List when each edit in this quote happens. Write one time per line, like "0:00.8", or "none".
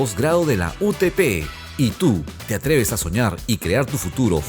none